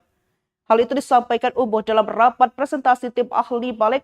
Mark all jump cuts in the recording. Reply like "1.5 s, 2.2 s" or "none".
2.5 s